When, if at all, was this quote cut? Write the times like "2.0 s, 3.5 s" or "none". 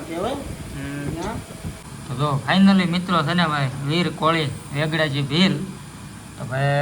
1.8 s